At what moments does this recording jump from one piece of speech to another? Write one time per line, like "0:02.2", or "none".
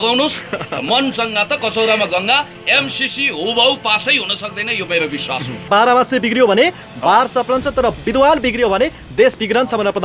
0:05.7
0:08.0